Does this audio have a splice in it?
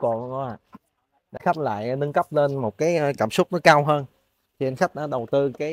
yes; 1 cut; at 1.4 s

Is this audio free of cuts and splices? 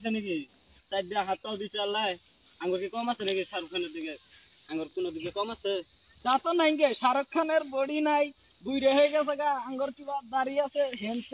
yes; 0 cuts

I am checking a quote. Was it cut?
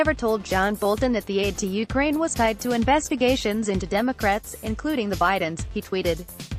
no; 0 cuts

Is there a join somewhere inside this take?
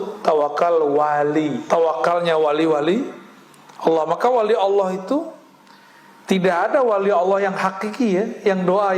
yes; 1 cut; at 1.6 s

